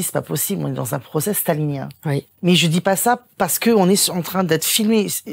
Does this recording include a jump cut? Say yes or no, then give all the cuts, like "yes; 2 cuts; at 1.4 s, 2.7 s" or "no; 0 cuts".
yes; 1 cut; at 2.3 s